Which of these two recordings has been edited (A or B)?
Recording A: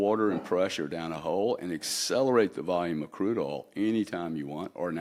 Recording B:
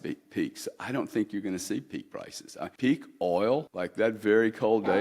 B